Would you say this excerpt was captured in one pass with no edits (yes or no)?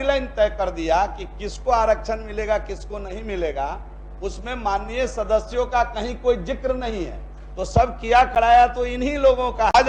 yes